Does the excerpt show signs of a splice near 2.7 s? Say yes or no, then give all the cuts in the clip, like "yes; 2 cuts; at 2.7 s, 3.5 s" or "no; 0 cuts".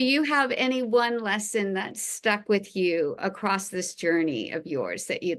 no; 0 cuts